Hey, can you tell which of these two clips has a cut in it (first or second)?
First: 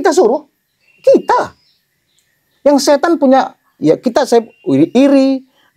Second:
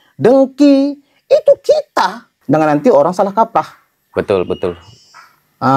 second